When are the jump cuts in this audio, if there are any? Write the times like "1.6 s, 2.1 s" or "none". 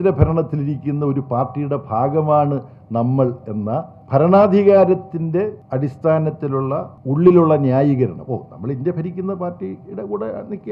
4.0 s, 5.6 s, 6.9 s